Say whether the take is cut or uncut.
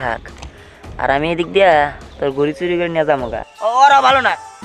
cut